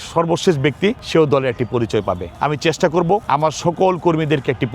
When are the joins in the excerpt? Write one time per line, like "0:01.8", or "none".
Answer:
0:01.0
0:02.3
0:03.2

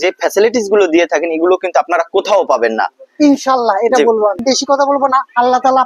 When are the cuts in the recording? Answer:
0:04.4

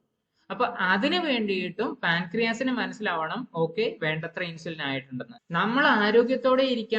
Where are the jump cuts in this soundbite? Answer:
0:05.4

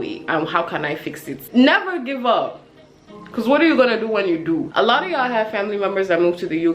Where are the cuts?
0:01.3
0:04.7

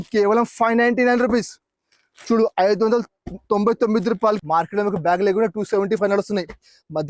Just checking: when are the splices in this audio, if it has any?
0:04.4

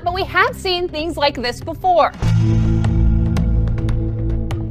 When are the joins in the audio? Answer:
0:02.2

